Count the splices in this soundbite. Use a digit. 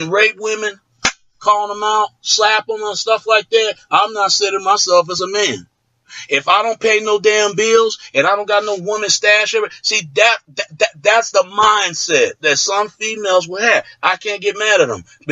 1